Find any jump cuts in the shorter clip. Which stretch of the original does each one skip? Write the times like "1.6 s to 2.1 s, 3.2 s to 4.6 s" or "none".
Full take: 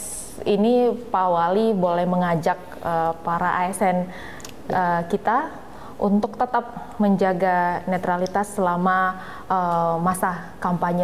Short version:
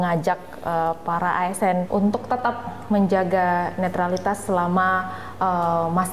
4.1 s to 6.0 s